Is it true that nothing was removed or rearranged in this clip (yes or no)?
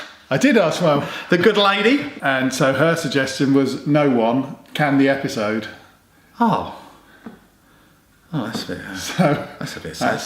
no